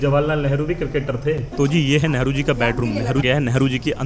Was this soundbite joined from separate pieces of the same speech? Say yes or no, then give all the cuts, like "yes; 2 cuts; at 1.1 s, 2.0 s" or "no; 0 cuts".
yes; 2 cuts; at 1.5 s, 3.2 s